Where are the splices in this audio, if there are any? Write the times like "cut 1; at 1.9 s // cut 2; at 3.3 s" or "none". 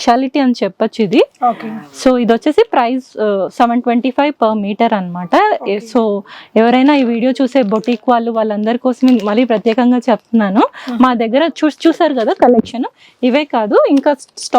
none